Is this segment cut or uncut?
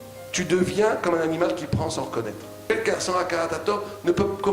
cut